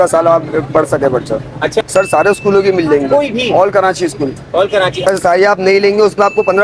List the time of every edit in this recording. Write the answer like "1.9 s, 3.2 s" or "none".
1.9 s, 5.0 s